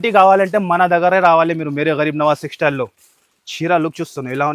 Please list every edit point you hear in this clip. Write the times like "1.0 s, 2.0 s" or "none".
none